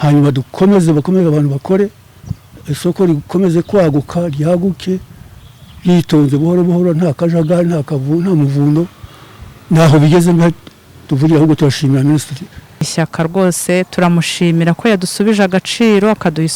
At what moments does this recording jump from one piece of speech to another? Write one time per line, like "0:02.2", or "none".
0:12.9